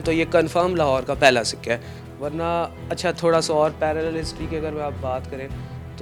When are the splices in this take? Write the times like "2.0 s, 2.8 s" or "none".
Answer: none